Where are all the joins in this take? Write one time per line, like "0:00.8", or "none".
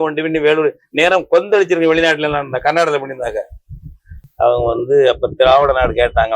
0:04.2